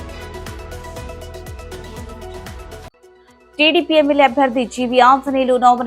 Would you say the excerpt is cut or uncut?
cut